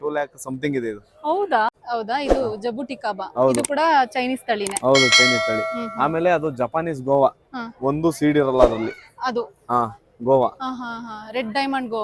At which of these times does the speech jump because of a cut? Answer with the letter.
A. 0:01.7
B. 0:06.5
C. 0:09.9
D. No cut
A